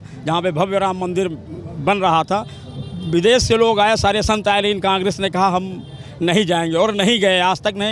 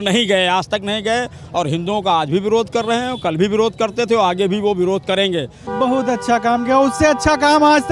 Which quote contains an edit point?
second; 1 cut; at 5.6 s

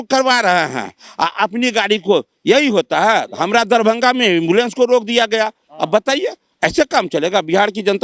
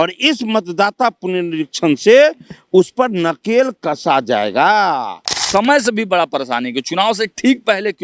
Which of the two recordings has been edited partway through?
second; 1 cut; at 5.4 s

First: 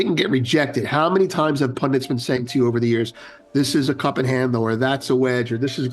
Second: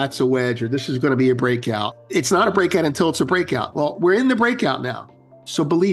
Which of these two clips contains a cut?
second; 1 cut; at 2.0 s

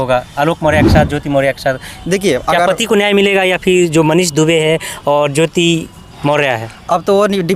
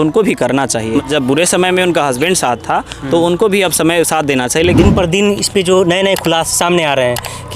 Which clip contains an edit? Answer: second; 2 cuts; at 1.0 s, 4.8 s

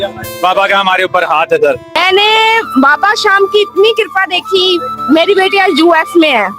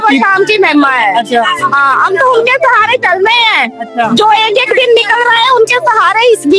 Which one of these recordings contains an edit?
first; 1 cut; at 1.8 s

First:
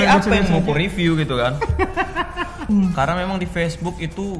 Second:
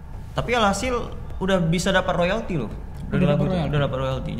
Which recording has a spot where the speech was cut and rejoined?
first; 1 cut; at 2.7 s

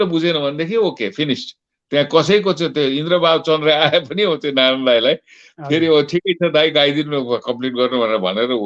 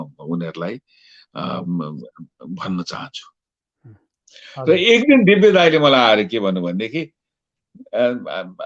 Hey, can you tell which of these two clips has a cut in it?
second; 1 cut; at 4.1 s

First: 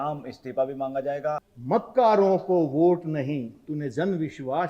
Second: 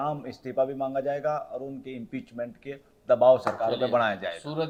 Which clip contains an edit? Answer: first; 1 cut; at 1.5 s

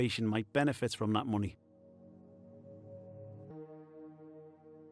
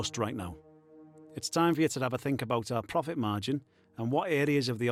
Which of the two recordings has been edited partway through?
first; 2 cuts; at 1.7 s, 3.5 s

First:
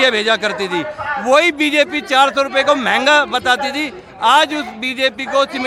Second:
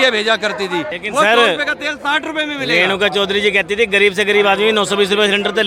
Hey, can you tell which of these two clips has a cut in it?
second; 1 cut; at 1.0 s

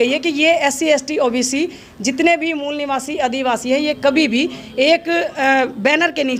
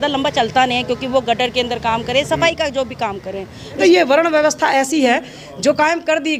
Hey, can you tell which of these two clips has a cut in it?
second; 1 cut; at 3.8 s

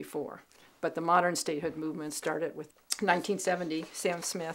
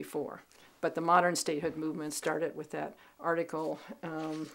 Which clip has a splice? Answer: first; 1 cut; at 2.6 s

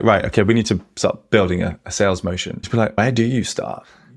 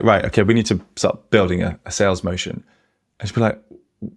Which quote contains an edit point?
first; 1 cut; at 3.0 s

